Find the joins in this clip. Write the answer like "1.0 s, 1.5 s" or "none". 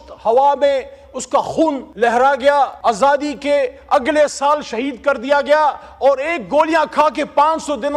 1.9 s, 2.8 s